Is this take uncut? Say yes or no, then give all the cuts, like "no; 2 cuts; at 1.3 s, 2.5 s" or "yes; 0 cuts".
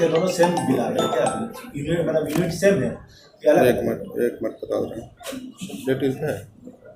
yes; 0 cuts